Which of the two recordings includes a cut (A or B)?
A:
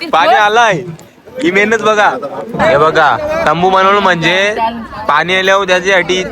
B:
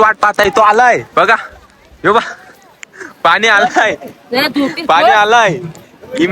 A